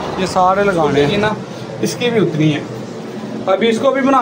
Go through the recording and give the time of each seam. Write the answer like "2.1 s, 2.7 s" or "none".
0.9 s